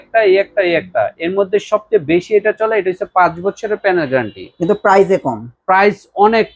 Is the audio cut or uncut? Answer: uncut